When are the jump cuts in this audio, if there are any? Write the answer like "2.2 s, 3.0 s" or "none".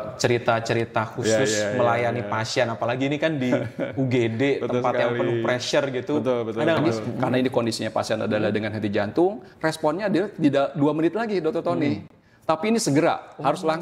6.8 s